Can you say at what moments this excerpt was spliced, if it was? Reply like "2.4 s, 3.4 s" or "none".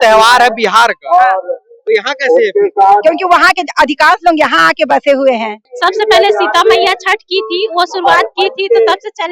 5.6 s